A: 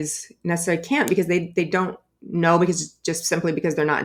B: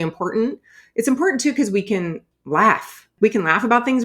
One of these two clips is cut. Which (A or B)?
B